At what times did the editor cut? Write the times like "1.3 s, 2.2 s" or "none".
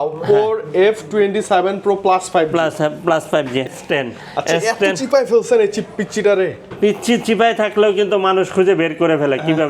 3.7 s